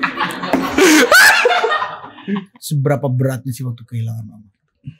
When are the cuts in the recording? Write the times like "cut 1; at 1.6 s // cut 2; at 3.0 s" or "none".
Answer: cut 1; at 2.6 s